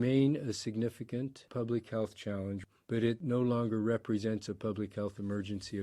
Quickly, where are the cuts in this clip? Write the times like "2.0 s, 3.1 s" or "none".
1.5 s, 2.9 s